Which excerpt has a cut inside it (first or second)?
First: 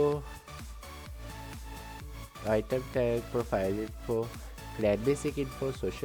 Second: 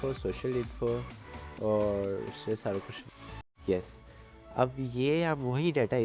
second